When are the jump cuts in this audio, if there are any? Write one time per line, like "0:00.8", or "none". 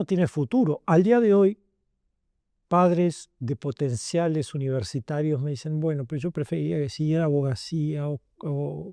none